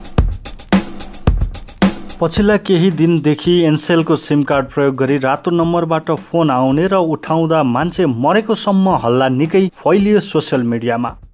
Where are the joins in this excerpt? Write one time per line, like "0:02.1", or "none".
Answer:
0:01.8